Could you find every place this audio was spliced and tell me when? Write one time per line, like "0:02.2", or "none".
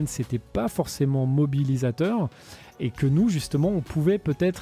0:02.8